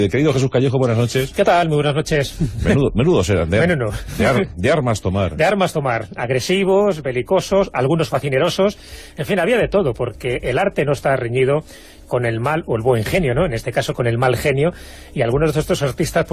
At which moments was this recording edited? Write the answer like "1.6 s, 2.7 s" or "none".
2.7 s